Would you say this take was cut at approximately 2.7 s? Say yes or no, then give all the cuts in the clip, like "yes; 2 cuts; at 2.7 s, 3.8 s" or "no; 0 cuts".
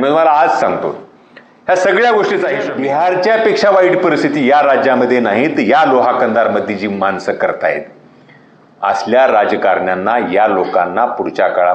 yes; 1 cut; at 2.7 s